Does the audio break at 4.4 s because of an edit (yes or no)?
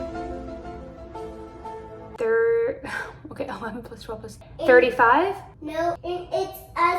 yes